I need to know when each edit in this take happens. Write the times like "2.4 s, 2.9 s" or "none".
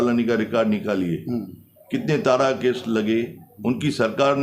none